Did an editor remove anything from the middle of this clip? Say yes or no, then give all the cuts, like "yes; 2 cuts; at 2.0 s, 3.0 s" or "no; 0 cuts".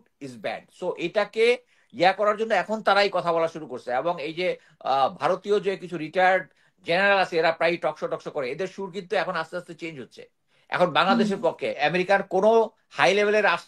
yes; 1 cut; at 11.8 s